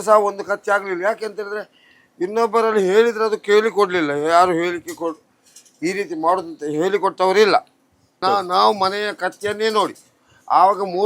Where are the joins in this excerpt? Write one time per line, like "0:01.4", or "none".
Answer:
0:08.2